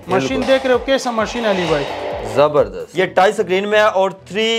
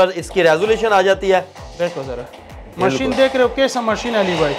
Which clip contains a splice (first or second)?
first